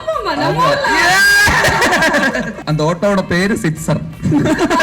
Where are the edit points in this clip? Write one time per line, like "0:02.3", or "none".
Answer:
0:02.6